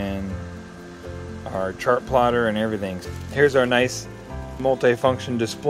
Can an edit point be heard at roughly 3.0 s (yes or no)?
yes